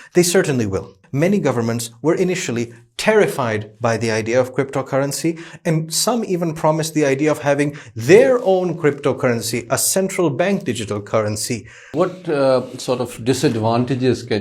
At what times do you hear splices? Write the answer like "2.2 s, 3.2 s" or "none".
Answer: 1.0 s, 11.9 s